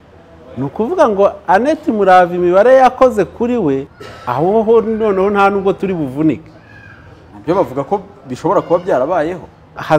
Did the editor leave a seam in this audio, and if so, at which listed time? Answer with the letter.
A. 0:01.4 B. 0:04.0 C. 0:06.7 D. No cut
B